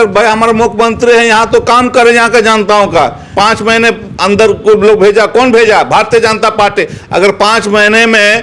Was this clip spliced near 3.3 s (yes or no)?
yes